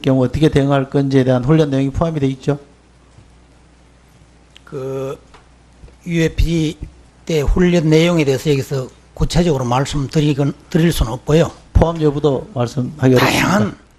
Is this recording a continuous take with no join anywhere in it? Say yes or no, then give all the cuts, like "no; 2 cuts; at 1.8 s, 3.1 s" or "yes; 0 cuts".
no; 1 cut; at 1.7 s